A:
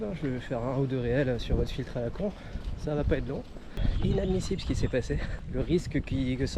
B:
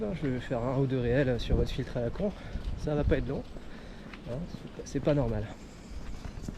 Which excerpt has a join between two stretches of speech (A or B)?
A